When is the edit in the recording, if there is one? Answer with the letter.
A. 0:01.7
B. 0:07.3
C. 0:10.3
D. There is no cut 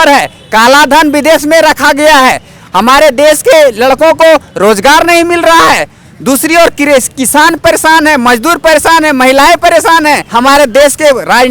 C